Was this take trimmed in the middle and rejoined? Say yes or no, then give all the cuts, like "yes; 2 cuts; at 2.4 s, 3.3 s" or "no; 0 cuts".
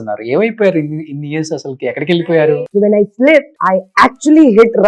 yes; 2 cuts; at 2.5 s, 3.6 s